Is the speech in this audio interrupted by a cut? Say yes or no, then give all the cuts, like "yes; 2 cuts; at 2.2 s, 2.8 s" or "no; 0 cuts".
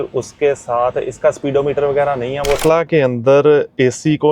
yes; 1 cut; at 2.6 s